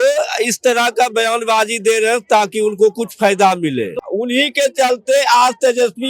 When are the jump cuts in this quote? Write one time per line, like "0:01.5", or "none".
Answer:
0:04.0